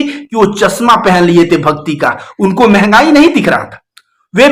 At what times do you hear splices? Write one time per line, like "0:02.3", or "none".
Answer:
none

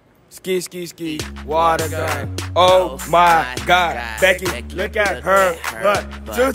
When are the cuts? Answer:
none

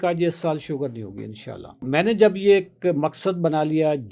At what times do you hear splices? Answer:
0:01.9

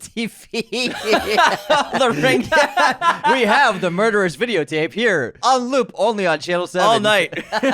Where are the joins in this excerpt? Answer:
0:05.4

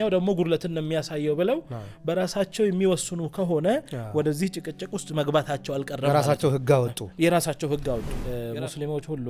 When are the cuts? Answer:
0:08.2

